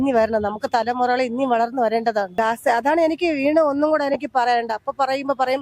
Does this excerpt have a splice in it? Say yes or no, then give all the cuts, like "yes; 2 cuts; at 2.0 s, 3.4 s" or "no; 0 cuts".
yes; 1 cut; at 2.4 s